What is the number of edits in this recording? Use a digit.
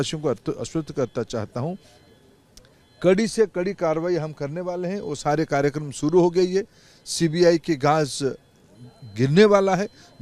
0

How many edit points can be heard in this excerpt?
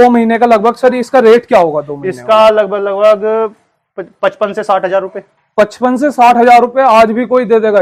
0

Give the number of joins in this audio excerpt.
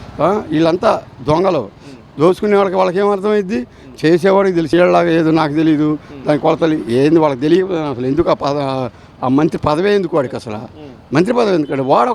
1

